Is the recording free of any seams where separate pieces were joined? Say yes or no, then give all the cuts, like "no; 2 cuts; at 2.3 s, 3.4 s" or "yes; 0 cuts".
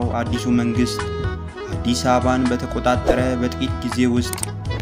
yes; 0 cuts